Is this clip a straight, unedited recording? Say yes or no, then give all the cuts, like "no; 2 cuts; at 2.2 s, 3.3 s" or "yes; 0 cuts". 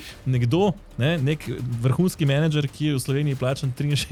yes; 0 cuts